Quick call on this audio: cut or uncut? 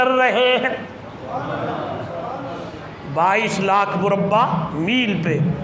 uncut